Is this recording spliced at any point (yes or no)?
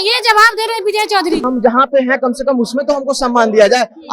yes